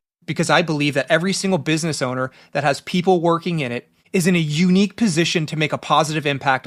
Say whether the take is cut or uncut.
uncut